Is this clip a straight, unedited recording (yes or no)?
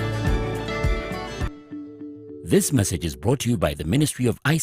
no